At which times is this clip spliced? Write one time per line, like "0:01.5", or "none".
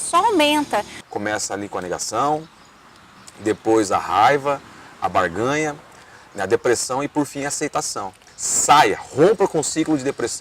0:01.0
0:08.2